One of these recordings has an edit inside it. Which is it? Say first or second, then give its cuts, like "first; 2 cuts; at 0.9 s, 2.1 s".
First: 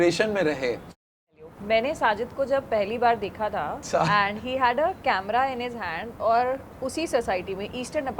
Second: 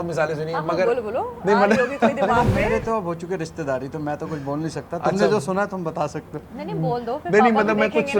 first; 2 cuts; at 1.3 s, 3.8 s